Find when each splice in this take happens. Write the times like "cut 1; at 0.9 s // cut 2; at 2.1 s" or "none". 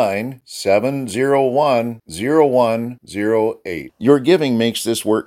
none